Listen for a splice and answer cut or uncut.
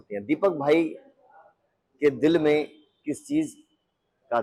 uncut